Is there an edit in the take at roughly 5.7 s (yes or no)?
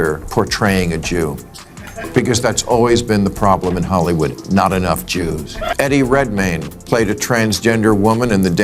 yes